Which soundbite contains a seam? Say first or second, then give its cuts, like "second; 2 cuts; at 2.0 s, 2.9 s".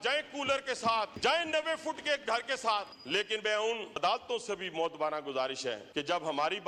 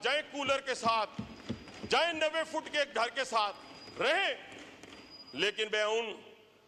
first; 4 cuts; at 1.1 s, 3.0 s, 4.0 s, 5.8 s